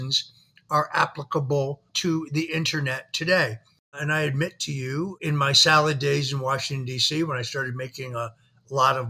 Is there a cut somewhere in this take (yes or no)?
yes